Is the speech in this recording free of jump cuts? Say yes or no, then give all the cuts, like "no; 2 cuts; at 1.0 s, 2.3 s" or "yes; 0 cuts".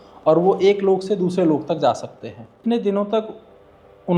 no; 1 cut; at 2.5 s